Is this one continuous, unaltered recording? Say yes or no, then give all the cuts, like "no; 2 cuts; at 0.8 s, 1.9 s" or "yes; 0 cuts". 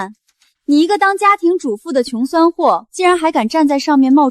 yes; 0 cuts